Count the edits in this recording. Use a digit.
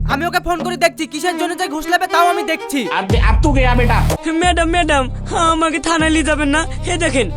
1